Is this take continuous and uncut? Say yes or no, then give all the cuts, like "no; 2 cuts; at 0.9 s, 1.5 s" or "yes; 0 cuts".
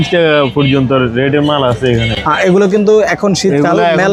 yes; 0 cuts